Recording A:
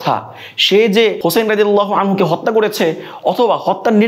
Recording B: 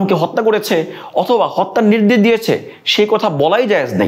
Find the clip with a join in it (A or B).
A